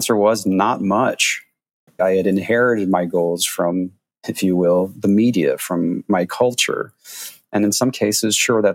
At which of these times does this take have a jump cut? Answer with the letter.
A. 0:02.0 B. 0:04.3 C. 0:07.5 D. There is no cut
A